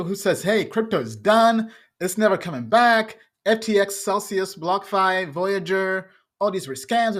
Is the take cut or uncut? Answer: uncut